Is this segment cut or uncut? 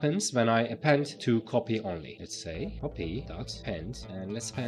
uncut